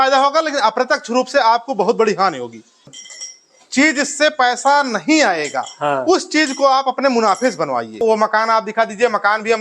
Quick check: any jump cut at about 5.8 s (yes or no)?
no